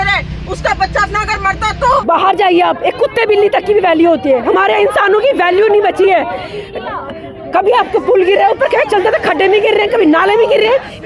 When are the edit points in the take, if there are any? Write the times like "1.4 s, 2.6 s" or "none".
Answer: 2.0 s